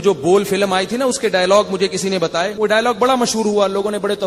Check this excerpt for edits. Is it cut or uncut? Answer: cut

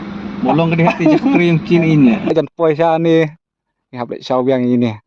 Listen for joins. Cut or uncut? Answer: cut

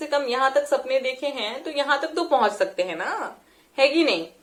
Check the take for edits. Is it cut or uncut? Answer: uncut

